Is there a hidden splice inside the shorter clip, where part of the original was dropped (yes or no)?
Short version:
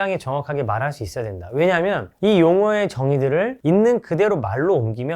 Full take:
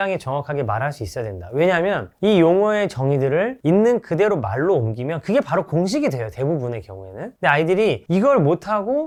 no